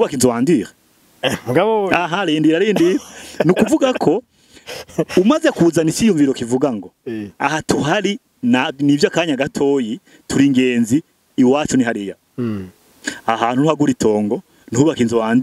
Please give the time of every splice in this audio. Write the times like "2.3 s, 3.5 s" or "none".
none